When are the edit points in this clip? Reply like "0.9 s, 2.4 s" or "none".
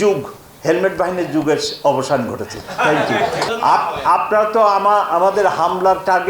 3.5 s

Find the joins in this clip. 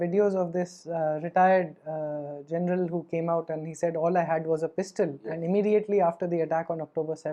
none

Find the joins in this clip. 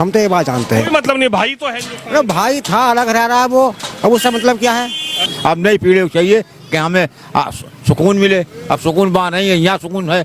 5.2 s

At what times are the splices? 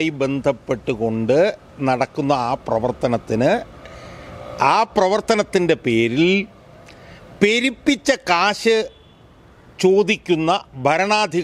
none

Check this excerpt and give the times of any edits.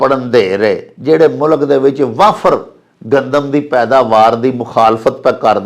0.9 s

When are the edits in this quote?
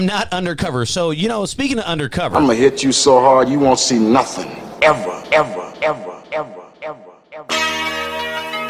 2.3 s

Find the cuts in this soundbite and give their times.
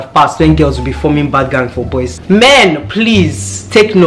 2.1 s

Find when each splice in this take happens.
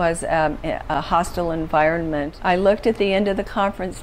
2.3 s

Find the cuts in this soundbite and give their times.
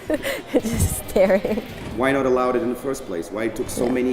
1.8 s

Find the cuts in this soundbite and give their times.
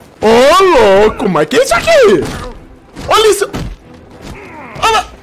none

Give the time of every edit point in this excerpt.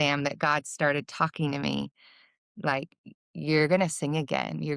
none

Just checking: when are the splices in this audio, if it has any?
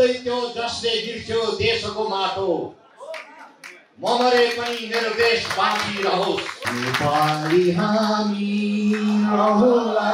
6.6 s

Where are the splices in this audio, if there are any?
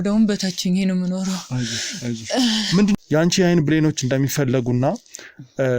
3.0 s

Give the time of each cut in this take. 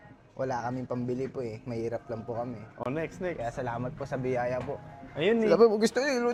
none

